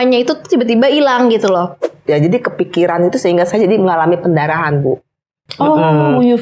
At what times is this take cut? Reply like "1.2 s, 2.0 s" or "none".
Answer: 1.8 s